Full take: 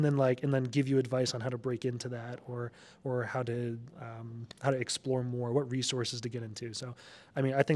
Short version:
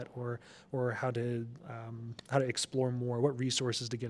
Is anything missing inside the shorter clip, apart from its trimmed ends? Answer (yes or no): no